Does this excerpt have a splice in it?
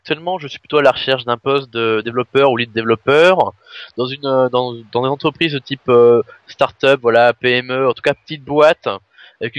no; 0 cuts

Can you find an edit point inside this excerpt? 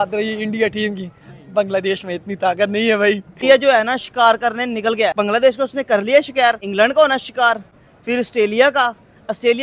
yes; 3 cuts; at 3.3 s, 5.1 s, 6.6 s

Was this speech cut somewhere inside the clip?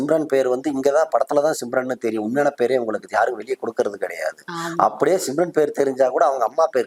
no; 0 cuts

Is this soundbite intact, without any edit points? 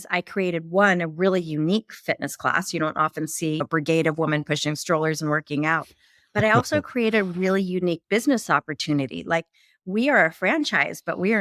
yes; 0 cuts

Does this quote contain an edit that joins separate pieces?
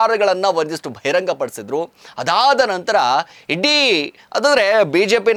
no; 0 cuts

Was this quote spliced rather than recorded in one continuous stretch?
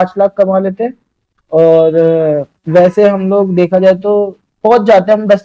no; 0 cuts

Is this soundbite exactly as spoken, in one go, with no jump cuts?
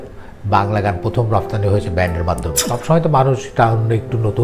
no; 1 cut; at 2.5 s

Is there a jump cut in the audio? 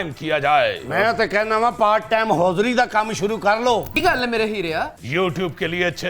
yes; 2 cuts; at 4.0 s, 5.0 s

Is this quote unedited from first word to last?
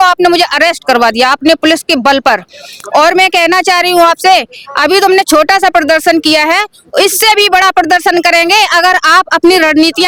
yes; 0 cuts

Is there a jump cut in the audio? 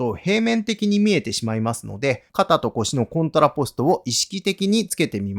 yes; 1 cut; at 2.2 s

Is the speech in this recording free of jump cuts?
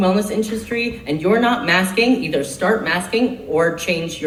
yes; 0 cuts

